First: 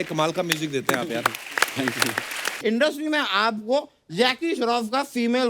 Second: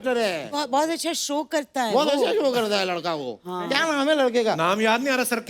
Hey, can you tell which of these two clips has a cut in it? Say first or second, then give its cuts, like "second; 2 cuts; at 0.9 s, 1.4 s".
first; 1 cut; at 2.6 s